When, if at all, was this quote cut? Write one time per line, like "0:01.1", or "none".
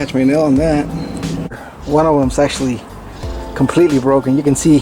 0:01.6